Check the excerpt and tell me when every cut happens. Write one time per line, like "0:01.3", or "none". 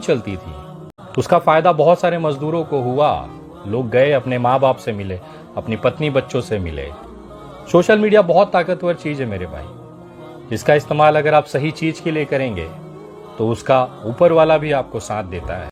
none